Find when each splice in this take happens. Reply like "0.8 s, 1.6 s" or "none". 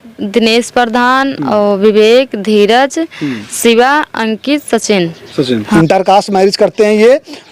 5.7 s